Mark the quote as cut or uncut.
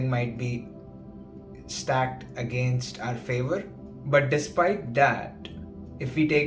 cut